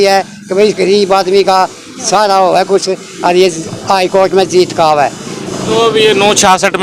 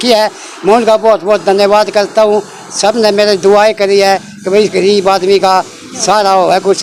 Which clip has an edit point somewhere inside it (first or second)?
first